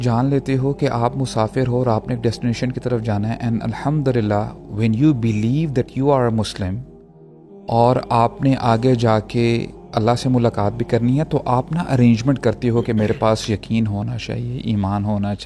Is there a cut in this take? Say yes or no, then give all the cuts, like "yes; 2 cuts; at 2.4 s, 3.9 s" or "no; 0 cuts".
no; 0 cuts